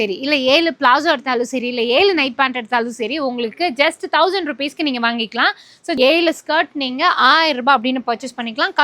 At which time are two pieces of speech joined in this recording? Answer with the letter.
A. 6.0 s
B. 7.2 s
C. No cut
A